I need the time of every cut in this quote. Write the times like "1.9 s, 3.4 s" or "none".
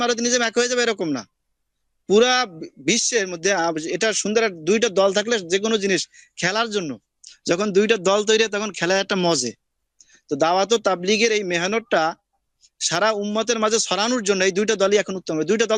none